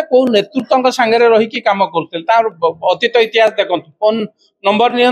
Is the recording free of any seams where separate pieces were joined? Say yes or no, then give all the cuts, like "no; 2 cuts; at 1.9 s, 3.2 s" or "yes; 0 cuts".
yes; 0 cuts